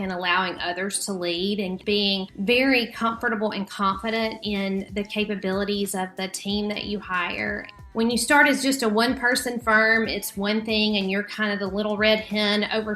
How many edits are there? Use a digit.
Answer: 2